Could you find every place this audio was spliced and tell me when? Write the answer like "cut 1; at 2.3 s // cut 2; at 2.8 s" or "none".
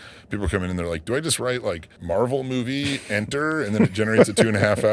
cut 1; at 1.9 s

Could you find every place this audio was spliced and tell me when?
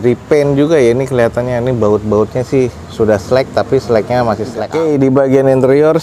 cut 1; at 4.5 s

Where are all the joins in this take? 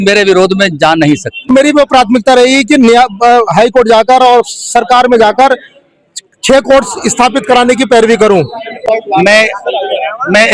cut 1; at 1.5 s // cut 2; at 8.9 s

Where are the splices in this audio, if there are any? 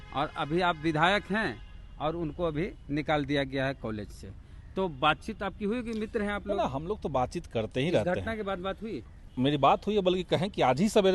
none

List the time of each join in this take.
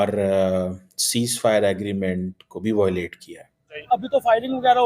cut 1; at 3.9 s

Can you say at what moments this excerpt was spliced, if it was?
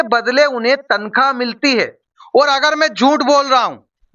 cut 1; at 2.1 s

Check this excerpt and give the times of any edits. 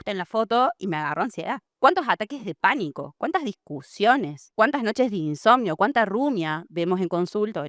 none

